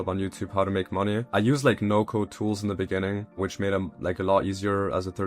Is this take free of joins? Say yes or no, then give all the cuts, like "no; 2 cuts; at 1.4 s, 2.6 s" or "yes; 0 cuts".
no; 2 cuts; at 1.3 s, 3.4 s